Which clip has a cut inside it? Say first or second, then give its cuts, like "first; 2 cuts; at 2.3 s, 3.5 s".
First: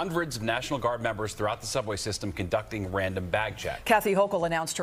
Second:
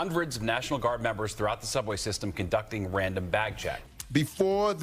second; 1 cut; at 3.8 s